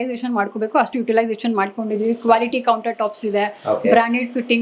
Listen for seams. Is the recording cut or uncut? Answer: uncut